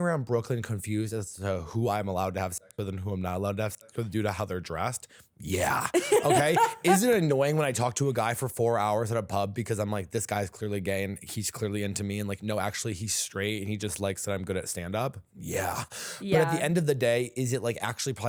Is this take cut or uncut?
uncut